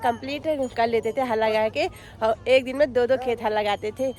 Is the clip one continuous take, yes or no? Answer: yes